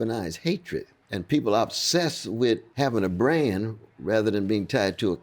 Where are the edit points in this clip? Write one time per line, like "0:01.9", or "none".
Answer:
0:01.0
0:02.7